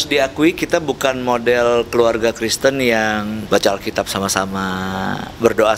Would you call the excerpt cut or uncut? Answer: cut